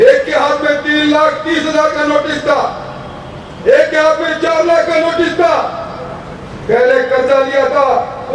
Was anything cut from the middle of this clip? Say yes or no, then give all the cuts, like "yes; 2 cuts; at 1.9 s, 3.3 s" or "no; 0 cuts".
no; 0 cuts